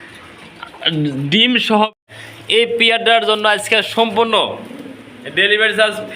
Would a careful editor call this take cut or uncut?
cut